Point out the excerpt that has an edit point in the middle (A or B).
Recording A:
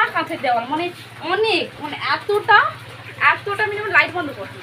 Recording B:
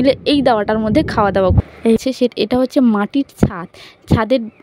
B